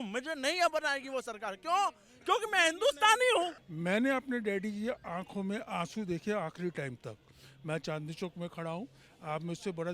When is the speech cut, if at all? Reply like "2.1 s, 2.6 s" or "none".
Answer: 3.6 s